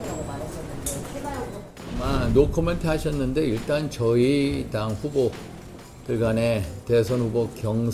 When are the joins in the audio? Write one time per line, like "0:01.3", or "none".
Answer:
0:01.7